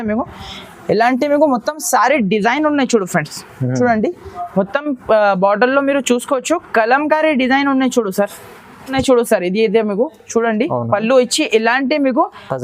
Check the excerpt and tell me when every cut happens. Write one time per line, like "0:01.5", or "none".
0:08.9